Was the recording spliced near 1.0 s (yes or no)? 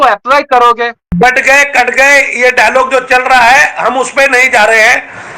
yes